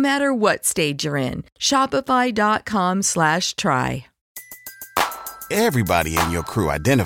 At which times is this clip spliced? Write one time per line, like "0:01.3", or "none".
0:04.1